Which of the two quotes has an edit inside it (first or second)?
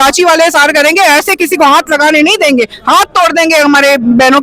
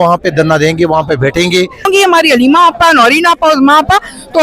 second